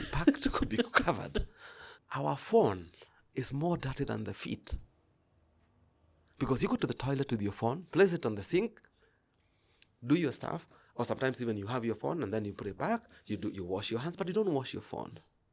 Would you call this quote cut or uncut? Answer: cut